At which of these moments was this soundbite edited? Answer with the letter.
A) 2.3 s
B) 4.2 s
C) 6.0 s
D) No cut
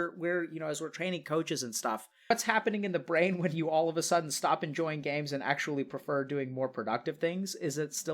A